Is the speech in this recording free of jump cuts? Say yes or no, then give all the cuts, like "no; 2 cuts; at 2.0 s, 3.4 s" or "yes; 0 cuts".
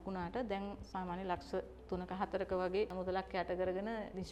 yes; 0 cuts